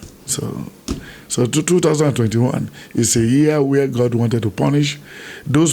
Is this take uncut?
yes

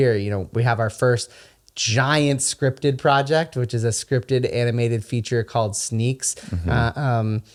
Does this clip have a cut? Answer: no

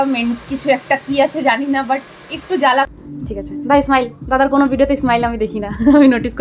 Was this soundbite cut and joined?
yes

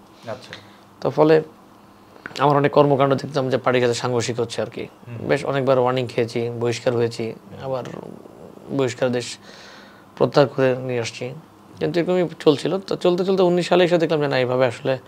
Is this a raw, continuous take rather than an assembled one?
yes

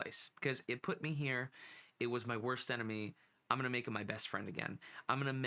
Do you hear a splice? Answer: no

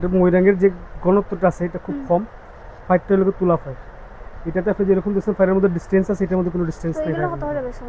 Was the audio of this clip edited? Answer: no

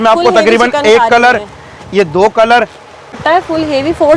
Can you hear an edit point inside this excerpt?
yes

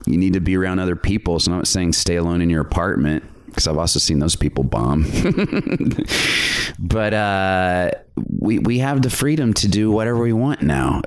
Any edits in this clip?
yes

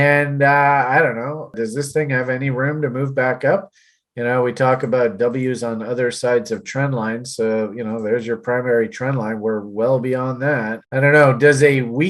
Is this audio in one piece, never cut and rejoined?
no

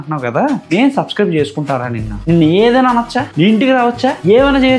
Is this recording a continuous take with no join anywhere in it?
yes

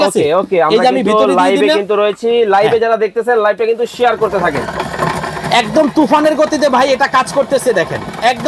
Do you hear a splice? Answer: no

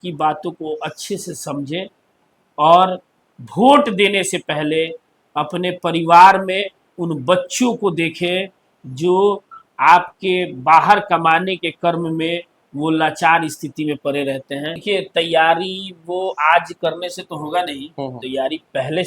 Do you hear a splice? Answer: yes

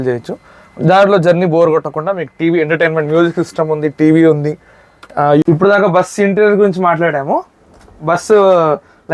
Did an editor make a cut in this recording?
yes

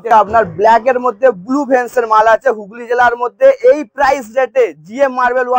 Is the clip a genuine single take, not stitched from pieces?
yes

